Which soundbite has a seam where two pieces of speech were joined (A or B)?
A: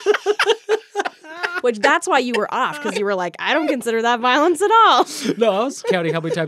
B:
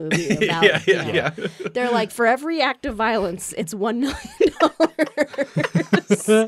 B